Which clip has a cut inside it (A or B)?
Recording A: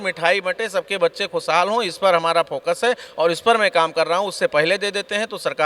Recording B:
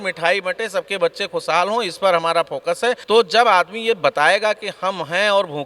B